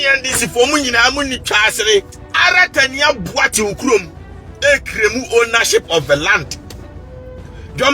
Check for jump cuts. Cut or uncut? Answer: cut